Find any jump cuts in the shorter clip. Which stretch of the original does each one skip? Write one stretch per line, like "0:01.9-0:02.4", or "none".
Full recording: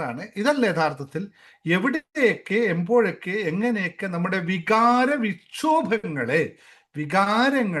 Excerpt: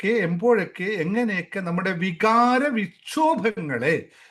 none